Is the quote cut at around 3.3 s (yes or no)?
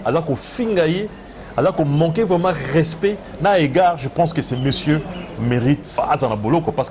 no